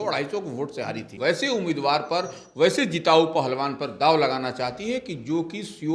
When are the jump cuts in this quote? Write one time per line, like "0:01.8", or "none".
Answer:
0:01.2

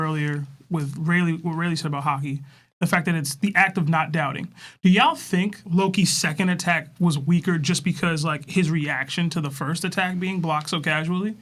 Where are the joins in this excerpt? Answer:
none

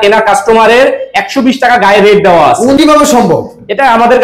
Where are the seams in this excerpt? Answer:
0:02.8

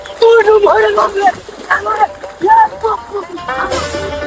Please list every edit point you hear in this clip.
none

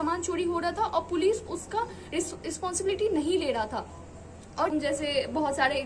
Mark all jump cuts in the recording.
0:04.7

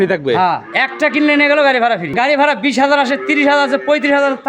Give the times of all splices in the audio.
0:02.1

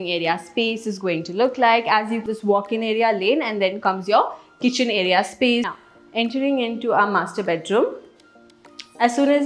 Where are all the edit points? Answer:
0:02.2
0:05.7

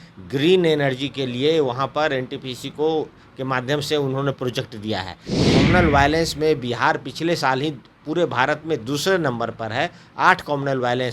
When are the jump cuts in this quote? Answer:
0:05.3

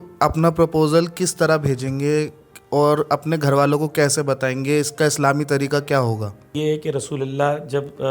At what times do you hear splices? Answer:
0:06.5

